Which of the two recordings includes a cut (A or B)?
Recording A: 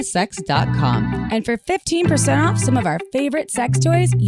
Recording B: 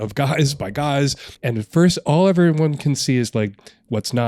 B